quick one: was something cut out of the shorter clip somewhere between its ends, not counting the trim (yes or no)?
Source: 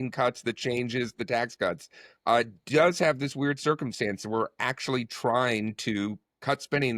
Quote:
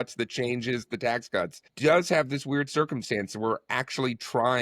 yes